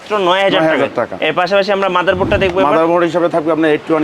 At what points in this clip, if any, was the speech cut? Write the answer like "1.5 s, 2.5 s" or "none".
1.1 s